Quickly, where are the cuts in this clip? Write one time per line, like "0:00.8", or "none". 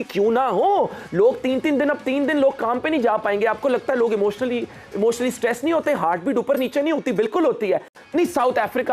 0:07.9